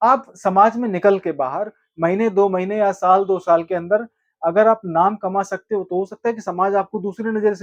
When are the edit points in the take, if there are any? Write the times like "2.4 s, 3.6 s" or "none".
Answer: none